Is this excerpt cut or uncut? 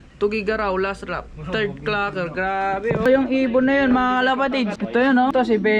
cut